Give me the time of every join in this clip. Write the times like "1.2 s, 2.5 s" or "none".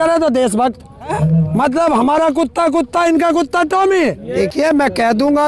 1.1 s, 4.2 s